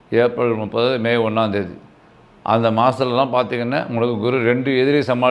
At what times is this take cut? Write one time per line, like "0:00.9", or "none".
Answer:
none